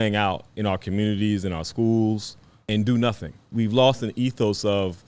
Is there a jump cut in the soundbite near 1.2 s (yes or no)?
no